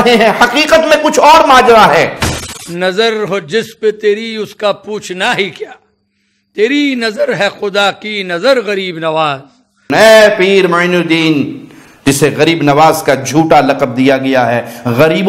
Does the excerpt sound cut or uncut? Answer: cut